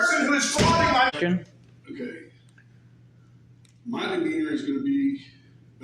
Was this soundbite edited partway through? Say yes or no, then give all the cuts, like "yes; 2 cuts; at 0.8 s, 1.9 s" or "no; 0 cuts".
yes; 1 cut; at 1.1 s